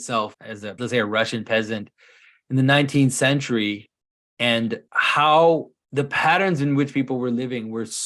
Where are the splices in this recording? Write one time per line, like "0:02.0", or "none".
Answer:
0:00.8
0:04.9
0:05.8